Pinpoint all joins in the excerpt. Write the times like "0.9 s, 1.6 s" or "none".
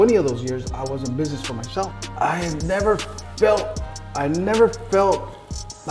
1.9 s